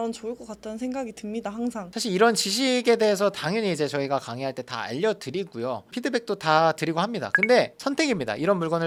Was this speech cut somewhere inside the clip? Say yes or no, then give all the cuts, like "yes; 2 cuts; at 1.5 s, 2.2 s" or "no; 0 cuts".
no; 0 cuts